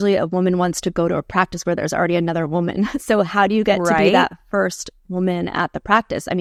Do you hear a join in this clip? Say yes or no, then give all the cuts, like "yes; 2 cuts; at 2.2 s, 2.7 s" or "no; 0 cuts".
no; 0 cuts